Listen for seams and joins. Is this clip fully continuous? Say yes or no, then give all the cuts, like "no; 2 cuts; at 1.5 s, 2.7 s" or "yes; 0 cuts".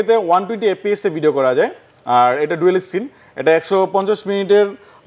yes; 0 cuts